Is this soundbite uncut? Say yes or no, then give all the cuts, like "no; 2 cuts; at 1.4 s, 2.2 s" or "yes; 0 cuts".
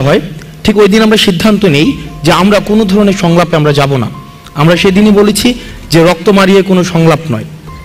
yes; 0 cuts